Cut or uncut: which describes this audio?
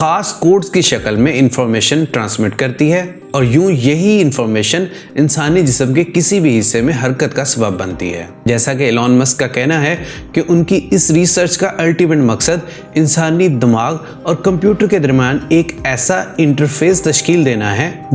cut